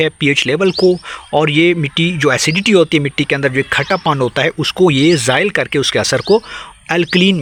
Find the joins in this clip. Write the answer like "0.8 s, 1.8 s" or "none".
none